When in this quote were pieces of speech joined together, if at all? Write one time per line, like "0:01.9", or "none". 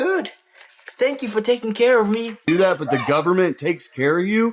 0:02.4